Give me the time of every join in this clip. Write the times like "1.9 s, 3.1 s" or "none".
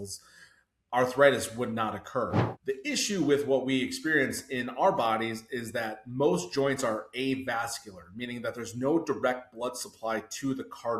2.5 s